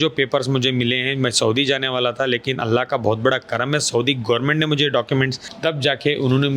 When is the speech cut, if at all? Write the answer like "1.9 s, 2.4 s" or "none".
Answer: 5.4 s